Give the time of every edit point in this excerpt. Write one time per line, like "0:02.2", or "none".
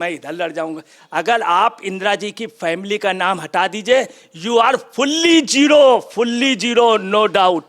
0:00.9